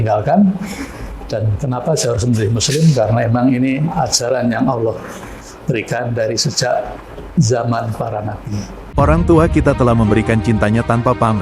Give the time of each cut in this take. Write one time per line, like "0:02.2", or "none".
0:08.9